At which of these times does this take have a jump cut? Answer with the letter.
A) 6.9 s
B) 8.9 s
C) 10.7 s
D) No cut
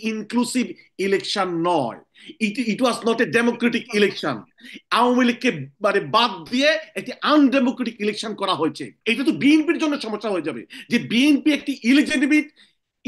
B